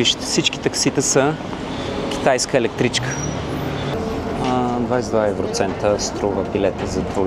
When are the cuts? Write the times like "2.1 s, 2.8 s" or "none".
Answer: 3.9 s